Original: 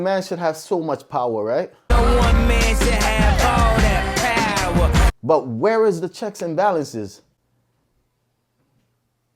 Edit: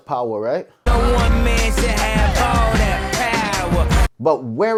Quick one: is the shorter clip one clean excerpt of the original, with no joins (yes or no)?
yes